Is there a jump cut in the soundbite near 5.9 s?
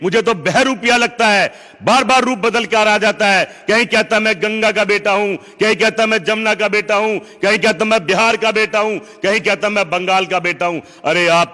no; 0 cuts

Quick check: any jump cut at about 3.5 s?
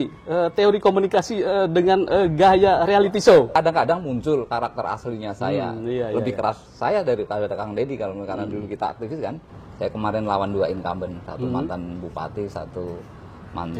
yes; 2 cuts; at 3.5 s, 9.4 s

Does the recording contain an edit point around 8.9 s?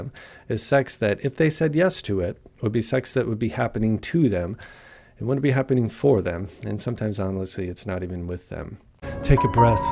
yes; 1 cut; at 8.9 s

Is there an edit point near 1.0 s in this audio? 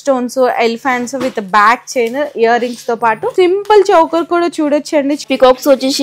no; 2 cuts; at 3.3 s, 5.2 s

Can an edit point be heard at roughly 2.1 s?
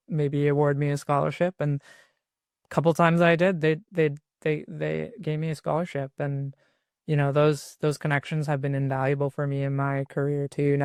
no; 0 cuts

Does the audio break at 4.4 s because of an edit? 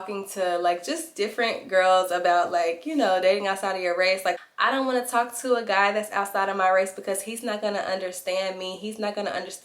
yes; 1 cut; at 4.4 s

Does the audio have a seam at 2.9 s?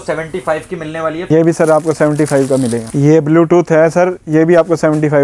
yes; 2 cuts; at 1.3 s, 2.9 s

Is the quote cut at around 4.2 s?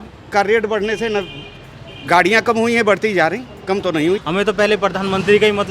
yes; 1 cut; at 4.2 s

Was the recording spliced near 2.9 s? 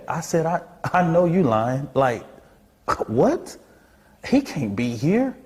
no; 0 cuts

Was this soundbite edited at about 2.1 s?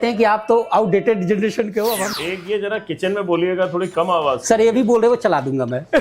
yes; 1 cut; at 2.1 s

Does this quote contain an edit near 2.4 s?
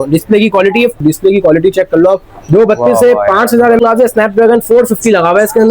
no; 2 cuts; at 1.0 s, 3.8 s

